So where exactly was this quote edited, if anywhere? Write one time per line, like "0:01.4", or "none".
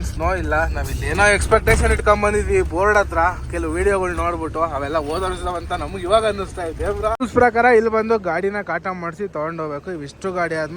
0:07.3